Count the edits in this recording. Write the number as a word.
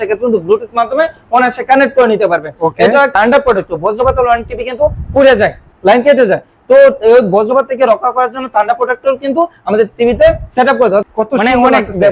two